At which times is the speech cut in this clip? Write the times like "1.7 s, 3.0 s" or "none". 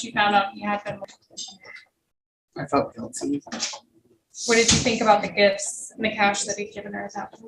1.0 s